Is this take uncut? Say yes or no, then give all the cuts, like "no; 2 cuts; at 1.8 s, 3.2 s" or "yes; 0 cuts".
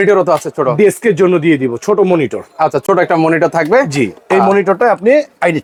yes; 0 cuts